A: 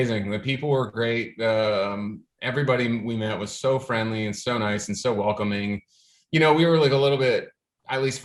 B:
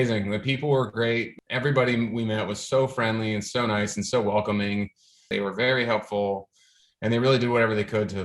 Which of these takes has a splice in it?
B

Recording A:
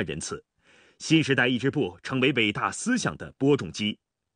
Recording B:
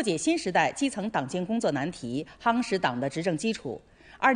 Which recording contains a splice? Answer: A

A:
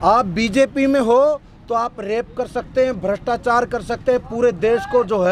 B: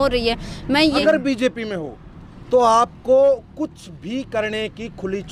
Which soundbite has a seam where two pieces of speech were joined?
B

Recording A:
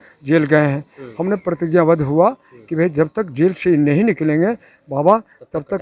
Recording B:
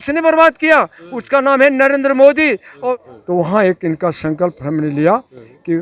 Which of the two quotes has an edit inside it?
B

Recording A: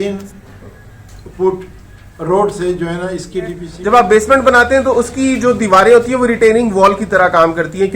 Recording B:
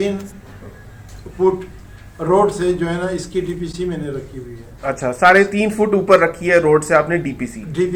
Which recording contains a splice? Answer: A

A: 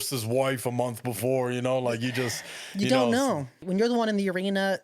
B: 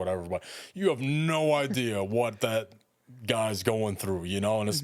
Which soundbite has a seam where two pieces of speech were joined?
A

